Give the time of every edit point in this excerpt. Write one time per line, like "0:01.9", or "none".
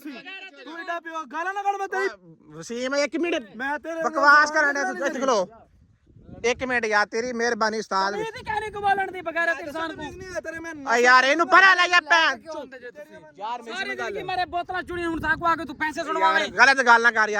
none